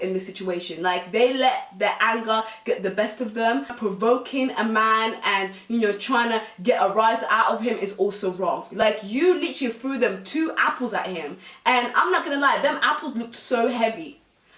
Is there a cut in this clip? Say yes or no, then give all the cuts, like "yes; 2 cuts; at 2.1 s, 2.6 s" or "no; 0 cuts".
no; 0 cuts